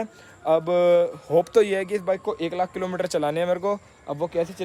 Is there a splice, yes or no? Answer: no